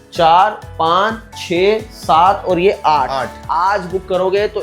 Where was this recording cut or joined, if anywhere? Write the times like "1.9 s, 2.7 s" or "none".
3.3 s